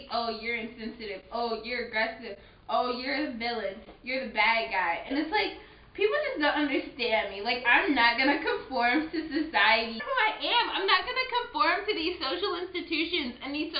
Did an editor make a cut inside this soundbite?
yes; 1 cut; at 10.0 s

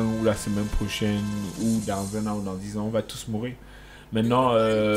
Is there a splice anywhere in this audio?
no; 0 cuts

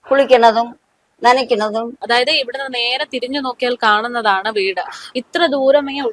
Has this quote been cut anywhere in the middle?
yes; 1 cut; at 2.0 s

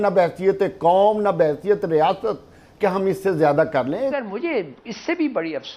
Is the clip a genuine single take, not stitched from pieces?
no; 1 cut; at 4.1 s

